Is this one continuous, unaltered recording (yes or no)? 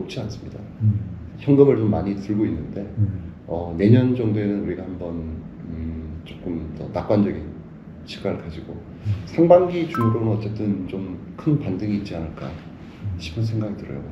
yes